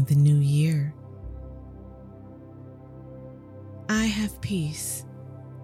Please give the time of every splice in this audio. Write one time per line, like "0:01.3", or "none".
none